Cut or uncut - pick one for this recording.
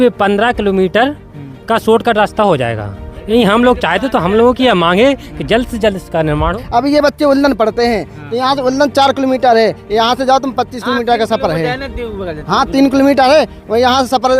cut